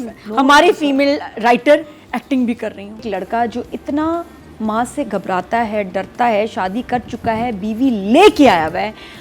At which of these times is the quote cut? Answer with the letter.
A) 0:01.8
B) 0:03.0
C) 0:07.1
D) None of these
B